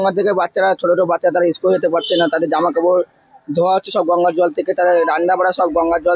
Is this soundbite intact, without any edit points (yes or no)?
yes